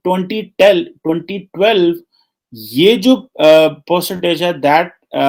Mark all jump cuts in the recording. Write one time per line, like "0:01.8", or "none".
none